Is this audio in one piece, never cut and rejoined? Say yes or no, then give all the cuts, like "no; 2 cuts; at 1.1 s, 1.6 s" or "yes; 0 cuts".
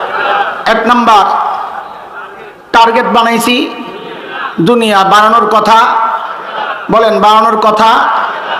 yes; 0 cuts